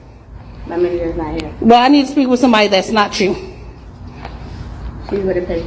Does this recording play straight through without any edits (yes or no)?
no